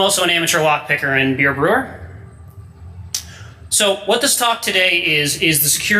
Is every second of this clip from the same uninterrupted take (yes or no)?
no